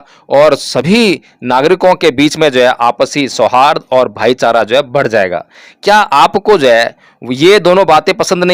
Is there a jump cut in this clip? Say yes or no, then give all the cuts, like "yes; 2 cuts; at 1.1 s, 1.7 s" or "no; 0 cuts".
no; 0 cuts